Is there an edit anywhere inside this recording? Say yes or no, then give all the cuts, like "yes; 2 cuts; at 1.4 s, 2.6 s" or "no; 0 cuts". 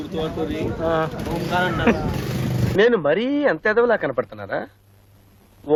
no; 0 cuts